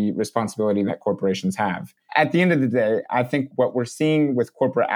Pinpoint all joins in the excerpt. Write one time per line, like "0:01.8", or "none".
0:02.1
0:03.5